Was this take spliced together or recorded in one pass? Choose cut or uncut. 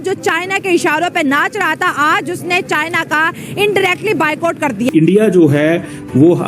cut